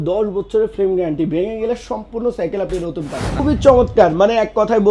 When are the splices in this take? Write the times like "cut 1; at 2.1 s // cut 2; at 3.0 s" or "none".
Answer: cut 1; at 3.3 s